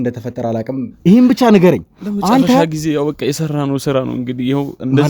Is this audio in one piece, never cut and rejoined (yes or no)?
no